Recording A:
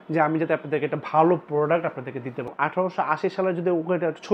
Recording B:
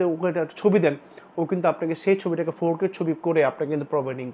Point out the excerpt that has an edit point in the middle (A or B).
A